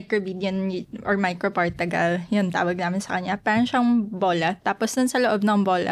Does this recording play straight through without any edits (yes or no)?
yes